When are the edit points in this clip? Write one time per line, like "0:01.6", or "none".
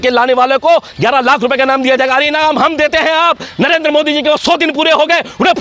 none